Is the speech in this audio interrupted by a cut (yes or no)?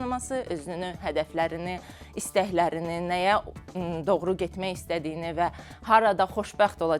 no